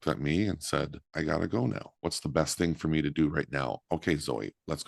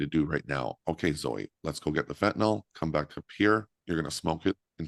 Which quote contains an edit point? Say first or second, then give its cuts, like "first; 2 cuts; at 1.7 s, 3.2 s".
first; 2 cuts; at 1.0 s, 2.0 s